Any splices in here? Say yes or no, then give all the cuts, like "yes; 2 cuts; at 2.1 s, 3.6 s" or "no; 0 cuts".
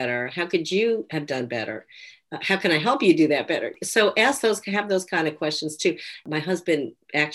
yes; 2 cuts; at 3.7 s, 6.2 s